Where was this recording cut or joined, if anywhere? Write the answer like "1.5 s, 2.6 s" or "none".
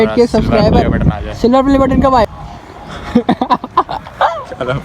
2.3 s